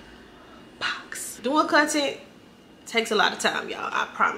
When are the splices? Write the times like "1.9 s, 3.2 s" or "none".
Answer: 1.4 s